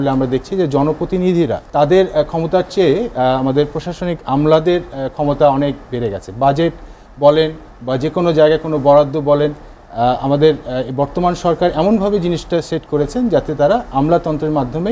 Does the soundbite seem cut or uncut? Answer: cut